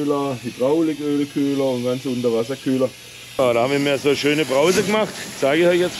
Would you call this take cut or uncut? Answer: cut